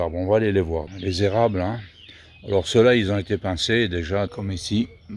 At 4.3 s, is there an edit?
yes; 2 cuts; at 0.9 s, 4.3 s

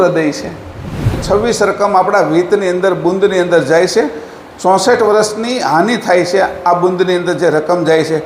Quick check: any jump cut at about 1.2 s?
yes; 1 cut; at 1.2 s

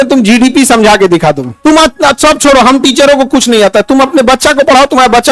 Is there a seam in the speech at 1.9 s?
no; 0 cuts

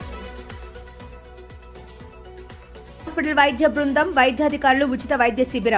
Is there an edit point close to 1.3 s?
yes; 1 cut; at 1.3 s

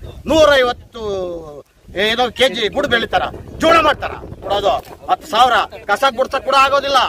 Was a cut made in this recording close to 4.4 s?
yes; 1 cut; at 4.4 s

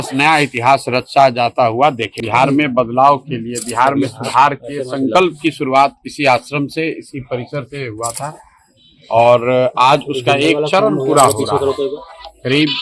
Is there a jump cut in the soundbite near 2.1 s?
yes; 1 cut; at 2.1 s

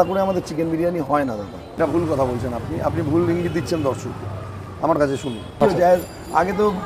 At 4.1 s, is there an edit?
no; 2 cuts; at 1.7 s, 5.4 s

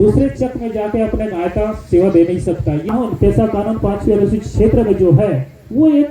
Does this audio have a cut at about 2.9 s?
yes; 1 cut; at 2.9 s

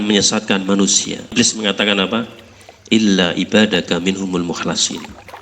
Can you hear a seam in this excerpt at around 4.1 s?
no; 1 cut; at 1.3 s

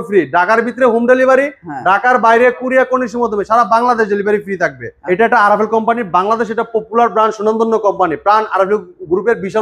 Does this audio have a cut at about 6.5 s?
no; 1 cut; at 4.9 s

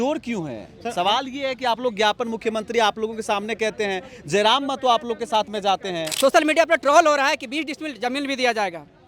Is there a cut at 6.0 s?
yes; 1 cut; at 6.0 s

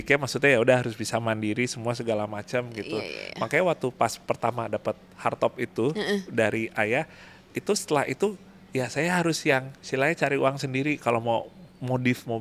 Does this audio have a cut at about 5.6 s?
no; 0 cuts

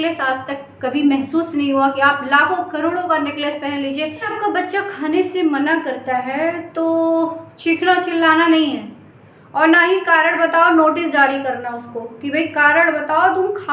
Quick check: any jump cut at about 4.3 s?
yes; 1 cut; at 4.3 s

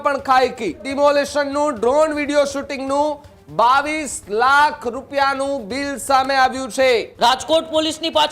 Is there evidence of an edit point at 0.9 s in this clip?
yes; 2 cuts; at 0.9 s, 7.1 s

